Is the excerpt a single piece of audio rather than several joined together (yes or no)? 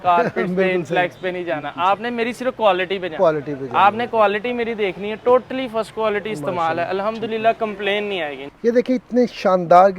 no